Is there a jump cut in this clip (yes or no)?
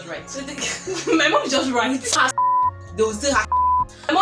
yes